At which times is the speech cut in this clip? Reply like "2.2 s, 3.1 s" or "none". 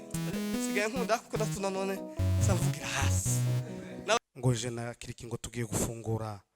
4.2 s